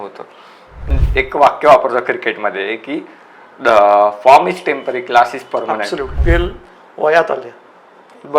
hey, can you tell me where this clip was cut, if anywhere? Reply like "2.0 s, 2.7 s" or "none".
0.9 s, 6.2 s